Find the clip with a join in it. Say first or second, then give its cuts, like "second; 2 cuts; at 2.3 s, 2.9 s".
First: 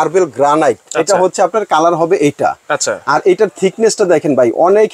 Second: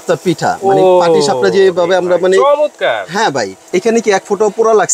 second; 1 cut; at 3.6 s